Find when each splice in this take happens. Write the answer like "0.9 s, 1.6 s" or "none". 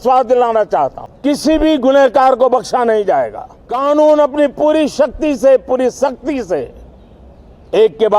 1.1 s, 3.6 s